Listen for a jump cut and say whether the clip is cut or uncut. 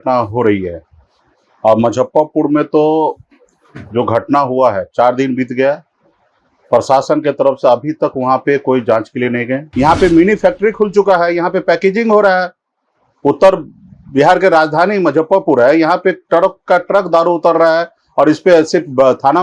cut